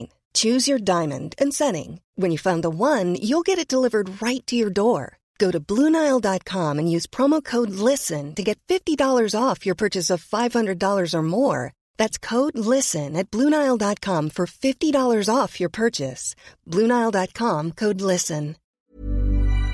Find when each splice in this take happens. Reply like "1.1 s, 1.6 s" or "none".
18.8 s